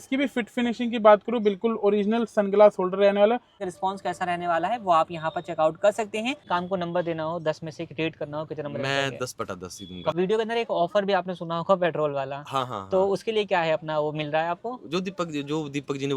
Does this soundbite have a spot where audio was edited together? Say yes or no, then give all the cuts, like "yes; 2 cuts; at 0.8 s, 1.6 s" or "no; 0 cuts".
yes; 3 cuts; at 3.6 s, 6.5 s, 10.1 s